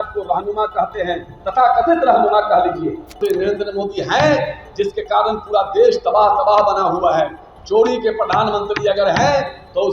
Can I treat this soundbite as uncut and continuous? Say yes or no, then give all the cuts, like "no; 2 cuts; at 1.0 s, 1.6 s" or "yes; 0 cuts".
no; 1 cut; at 3.2 s